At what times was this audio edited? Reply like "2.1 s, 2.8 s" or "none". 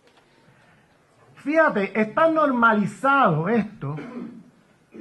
1.3 s